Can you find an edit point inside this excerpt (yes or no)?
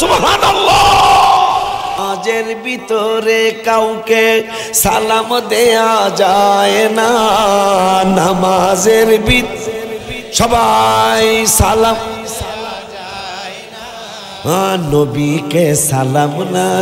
yes